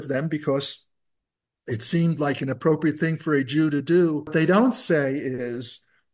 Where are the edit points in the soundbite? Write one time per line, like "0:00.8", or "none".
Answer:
0:04.3